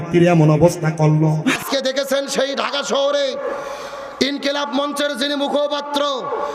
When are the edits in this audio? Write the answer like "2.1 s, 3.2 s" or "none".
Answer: 1.6 s